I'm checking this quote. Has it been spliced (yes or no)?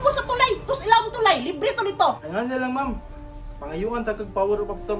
yes